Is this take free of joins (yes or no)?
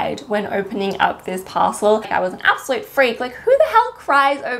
no